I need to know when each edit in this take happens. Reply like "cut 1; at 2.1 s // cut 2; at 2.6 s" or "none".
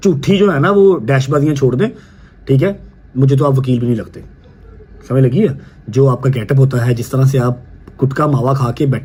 none